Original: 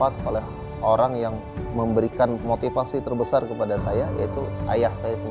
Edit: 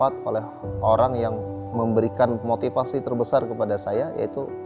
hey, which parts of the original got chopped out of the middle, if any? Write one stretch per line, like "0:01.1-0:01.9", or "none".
none